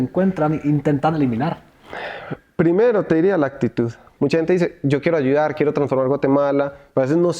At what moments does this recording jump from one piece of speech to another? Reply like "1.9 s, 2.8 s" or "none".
4.0 s